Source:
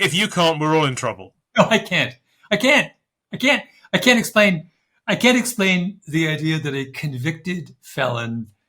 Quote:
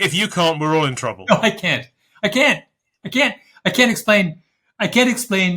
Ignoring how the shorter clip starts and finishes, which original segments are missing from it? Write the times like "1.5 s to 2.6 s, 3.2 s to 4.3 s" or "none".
1.1 s to 1.4 s